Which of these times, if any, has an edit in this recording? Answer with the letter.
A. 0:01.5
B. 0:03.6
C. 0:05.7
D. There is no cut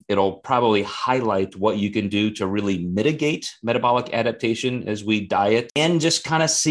C